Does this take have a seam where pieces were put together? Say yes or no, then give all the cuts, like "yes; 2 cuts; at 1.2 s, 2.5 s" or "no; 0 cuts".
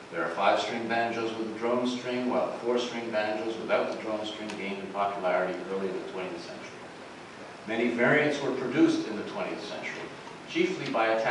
yes; 1 cut; at 6.1 s